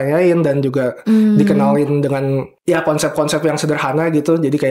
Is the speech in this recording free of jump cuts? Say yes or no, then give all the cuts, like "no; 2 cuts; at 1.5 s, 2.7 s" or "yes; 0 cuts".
yes; 0 cuts